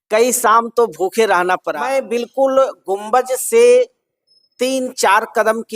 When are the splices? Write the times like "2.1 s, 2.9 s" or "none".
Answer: 1.7 s